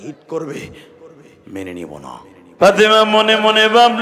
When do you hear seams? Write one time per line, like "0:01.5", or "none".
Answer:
0:02.4